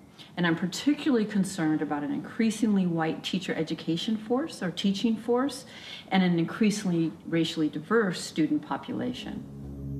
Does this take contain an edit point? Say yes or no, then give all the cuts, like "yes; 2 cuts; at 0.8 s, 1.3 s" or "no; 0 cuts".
yes; 1 cut; at 9.0 s